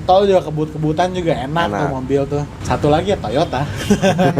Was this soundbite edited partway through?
yes; 1 cut; at 2.6 s

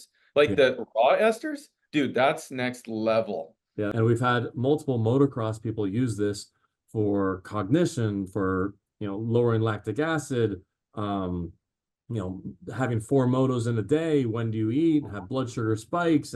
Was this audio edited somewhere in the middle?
yes; 1 cut; at 3.9 s

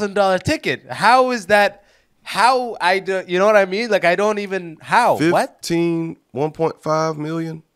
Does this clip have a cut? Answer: no; 0 cuts

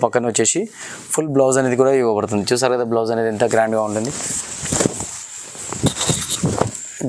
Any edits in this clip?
no; 0 cuts

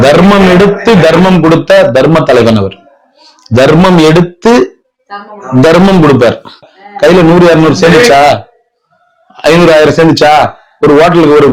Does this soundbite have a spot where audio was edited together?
no; 0 cuts

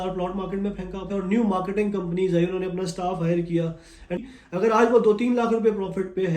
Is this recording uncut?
no; 2 cuts; at 1.0 s, 4.2 s

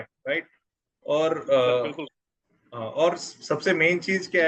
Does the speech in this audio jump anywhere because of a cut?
no; 0 cuts

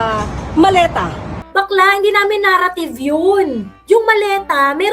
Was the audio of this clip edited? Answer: yes; 1 cut; at 1.4 s

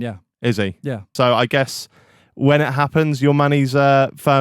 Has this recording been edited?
yes; 1 cut; at 1.1 s

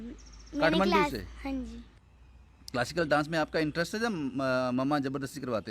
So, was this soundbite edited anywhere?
yes; 1 cut; at 1.9 s

